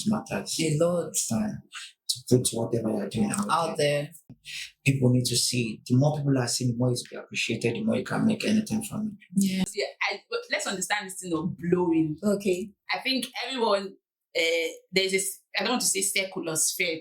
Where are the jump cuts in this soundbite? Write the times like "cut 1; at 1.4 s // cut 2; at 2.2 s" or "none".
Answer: cut 1; at 4.4 s // cut 2; at 9.6 s

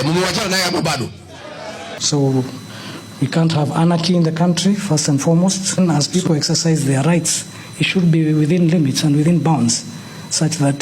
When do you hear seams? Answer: cut 1; at 1.9 s

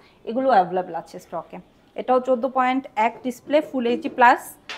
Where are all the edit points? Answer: none

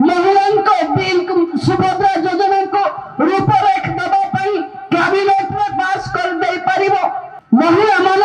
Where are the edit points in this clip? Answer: cut 1; at 7.3 s

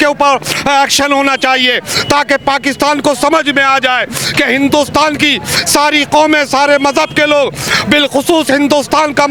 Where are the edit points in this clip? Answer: none

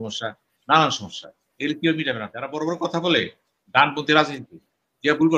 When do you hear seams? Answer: cut 1; at 2.4 s

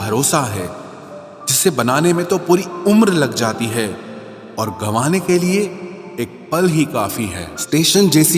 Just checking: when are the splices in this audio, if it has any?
cut 1; at 7.4 s

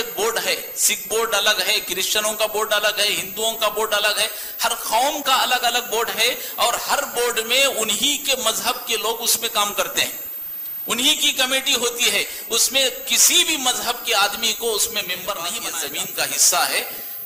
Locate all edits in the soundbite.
cut 1; at 15.6 s

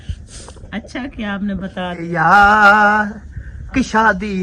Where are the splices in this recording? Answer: cut 1; at 2.1 s

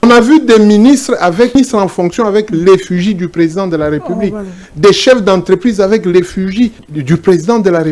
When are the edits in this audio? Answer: cut 1; at 1.6 s // cut 2; at 6.9 s

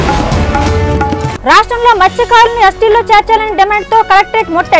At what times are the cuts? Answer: cut 1; at 1.3 s

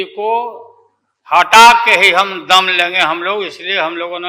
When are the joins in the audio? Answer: none

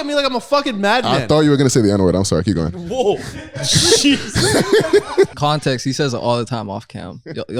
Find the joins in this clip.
cut 1; at 5.4 s

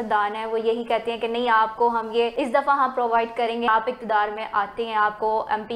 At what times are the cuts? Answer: cut 1; at 2.3 s // cut 2; at 3.7 s

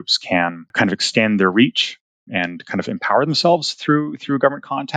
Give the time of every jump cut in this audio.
none

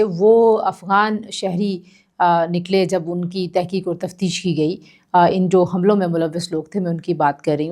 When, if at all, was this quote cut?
none

